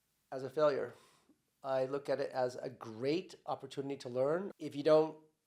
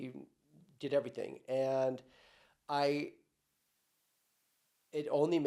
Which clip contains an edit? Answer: first; 1 cut; at 4.5 s

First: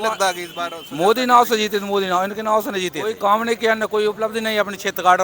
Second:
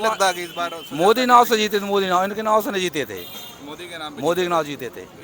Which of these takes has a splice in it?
first; 1 cut; at 3.1 s

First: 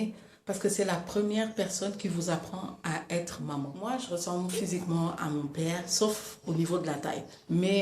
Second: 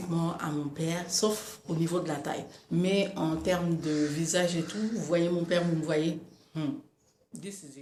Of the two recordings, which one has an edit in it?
first; 1 cut; at 3.7 s

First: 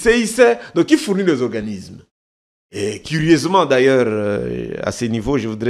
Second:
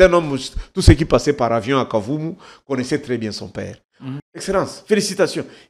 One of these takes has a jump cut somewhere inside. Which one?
second; 1 cut; at 4.2 s

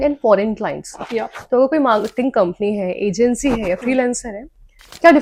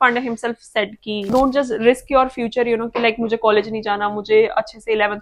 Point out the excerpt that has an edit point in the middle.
second; 1 cut; at 1.3 s

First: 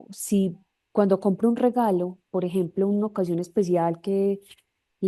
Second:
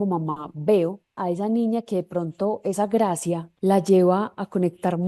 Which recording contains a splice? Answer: second; 2 cuts; at 1.2 s, 3.5 s

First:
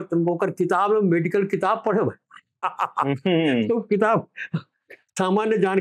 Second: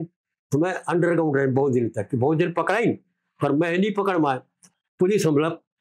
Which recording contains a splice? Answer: second; 1 cut; at 4.7 s

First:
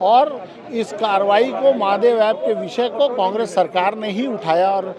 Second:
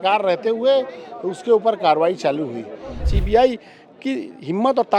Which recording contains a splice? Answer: second; 1 cut; at 3.1 s

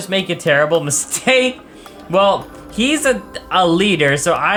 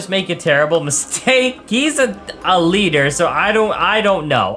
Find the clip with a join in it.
second; 1 cut; at 1.6 s

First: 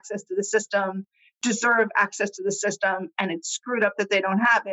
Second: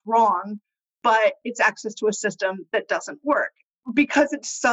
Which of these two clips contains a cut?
second; 1 cut; at 3.6 s

